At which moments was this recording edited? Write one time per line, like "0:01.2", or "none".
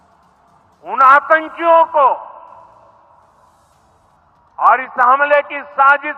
none